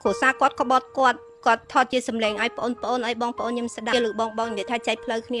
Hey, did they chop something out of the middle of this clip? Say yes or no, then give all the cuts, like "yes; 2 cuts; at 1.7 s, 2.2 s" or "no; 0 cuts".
yes; 1 cut; at 3.9 s